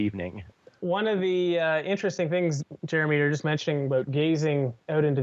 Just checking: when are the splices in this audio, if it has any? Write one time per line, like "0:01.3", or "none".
0:01.5